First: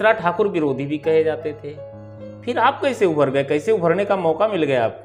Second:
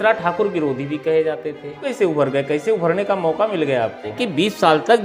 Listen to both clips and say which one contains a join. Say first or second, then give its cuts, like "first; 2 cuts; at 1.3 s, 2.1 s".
second; 2 cuts; at 1.8 s, 4.2 s